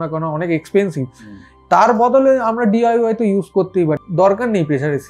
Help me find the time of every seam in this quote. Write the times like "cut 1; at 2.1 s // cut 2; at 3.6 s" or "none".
cut 1; at 4.0 s